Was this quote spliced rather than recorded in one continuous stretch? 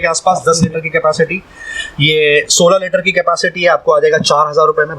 no; 0 cuts

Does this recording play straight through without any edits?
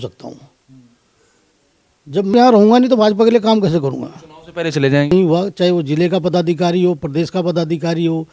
no; 2 cuts; at 2.3 s, 5.1 s

